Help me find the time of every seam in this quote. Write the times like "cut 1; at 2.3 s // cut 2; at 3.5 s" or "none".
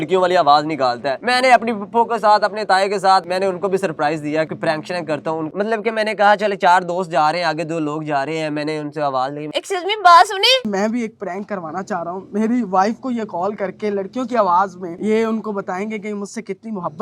cut 1; at 3.2 s // cut 2; at 4.5 s // cut 3; at 5.5 s // cut 4; at 9.5 s // cut 5; at 10.7 s